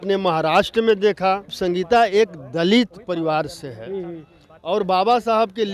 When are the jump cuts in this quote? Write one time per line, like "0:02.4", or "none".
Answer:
0:01.5